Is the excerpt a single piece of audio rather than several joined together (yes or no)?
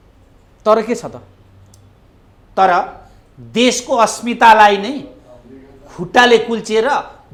yes